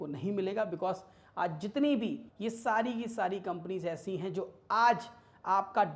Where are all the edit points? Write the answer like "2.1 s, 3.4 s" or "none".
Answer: 2.3 s